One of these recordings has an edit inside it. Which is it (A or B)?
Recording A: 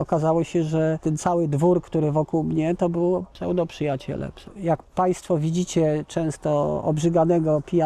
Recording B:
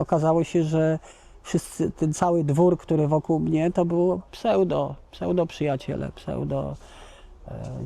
A